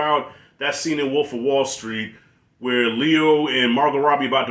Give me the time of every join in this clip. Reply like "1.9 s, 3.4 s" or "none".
none

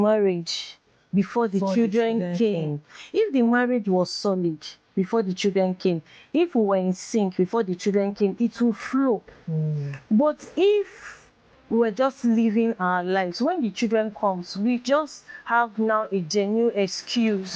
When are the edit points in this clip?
none

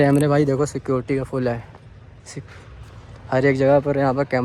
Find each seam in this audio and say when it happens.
none

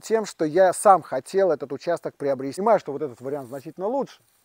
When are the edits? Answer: 2.6 s

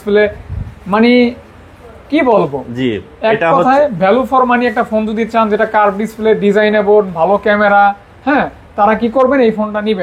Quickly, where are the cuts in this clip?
none

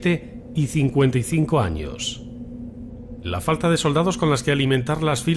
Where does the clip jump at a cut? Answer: none

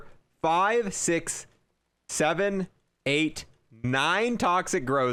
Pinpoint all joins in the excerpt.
none

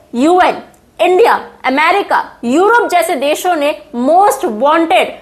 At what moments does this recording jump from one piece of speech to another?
none

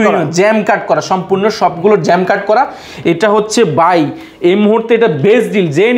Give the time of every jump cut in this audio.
none

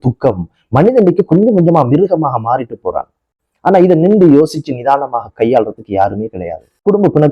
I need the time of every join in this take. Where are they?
none

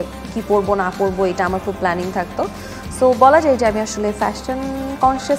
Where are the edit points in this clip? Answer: 2.8 s

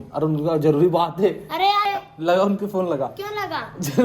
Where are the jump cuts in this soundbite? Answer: 1.8 s

